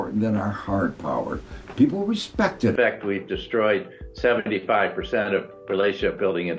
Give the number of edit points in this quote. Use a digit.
1